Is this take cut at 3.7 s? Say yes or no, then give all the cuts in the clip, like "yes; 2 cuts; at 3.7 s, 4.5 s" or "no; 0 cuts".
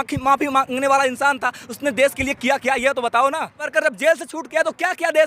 yes; 1 cut; at 3.7 s